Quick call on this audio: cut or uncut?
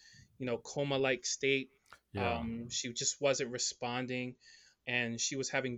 uncut